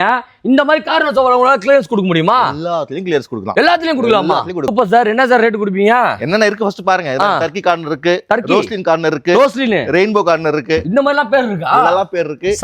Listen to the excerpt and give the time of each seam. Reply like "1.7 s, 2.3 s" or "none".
4.7 s